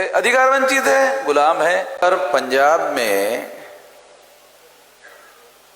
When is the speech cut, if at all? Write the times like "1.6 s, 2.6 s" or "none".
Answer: 2.0 s